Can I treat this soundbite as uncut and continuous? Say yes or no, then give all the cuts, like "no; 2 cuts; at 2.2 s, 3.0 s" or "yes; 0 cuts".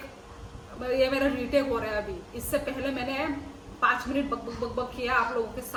yes; 0 cuts